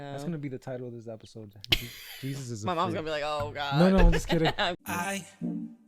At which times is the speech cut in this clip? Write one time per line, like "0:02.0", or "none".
0:04.8